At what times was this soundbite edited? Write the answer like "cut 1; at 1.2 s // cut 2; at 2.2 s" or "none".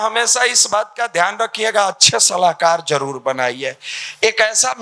none